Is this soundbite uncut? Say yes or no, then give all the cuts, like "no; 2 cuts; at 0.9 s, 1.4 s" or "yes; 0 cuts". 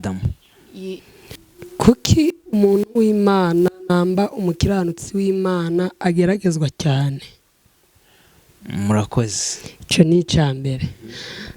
no; 1 cut; at 1.0 s